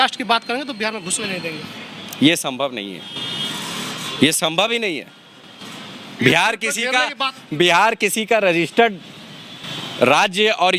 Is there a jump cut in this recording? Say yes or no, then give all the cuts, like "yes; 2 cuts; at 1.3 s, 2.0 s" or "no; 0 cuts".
no; 0 cuts